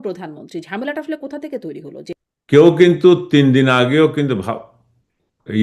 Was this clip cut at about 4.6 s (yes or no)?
no